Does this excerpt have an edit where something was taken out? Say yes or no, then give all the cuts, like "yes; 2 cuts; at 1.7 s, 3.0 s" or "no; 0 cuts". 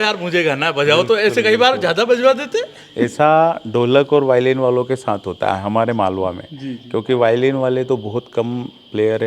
no; 0 cuts